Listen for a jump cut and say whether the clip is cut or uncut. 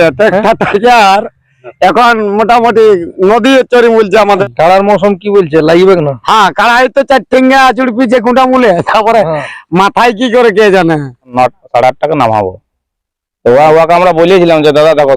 cut